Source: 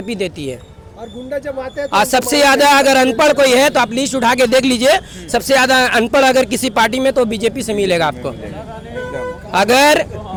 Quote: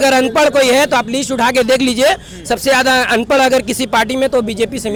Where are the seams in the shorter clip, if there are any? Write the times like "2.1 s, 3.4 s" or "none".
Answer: none